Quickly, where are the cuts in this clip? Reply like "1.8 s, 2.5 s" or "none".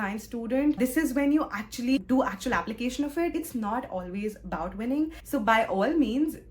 2.0 s, 3.4 s, 5.2 s

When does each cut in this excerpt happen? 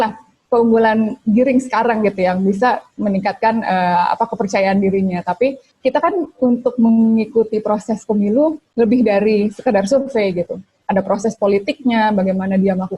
5.7 s

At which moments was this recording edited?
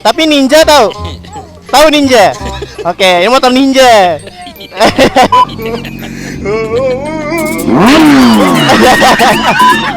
5.3 s

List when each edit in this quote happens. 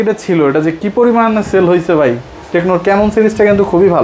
none

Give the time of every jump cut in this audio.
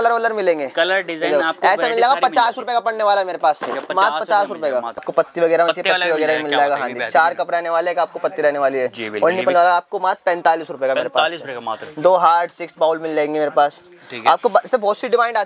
5.1 s

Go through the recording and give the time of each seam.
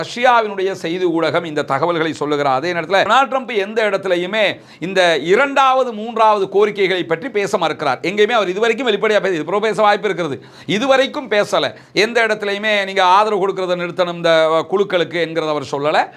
3.1 s

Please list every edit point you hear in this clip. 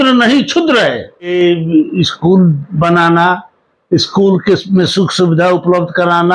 1.3 s

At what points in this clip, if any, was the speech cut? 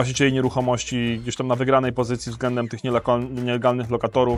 none

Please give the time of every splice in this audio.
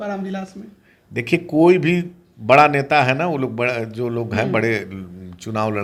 none

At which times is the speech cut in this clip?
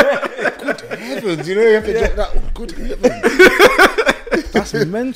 none

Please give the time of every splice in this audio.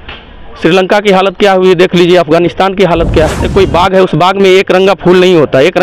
3.4 s

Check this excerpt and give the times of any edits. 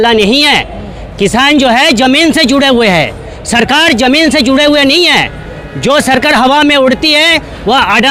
none

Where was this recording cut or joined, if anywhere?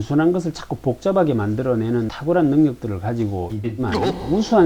2.1 s

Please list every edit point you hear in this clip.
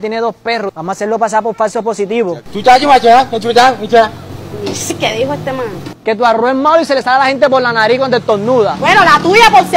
2.4 s, 8.8 s

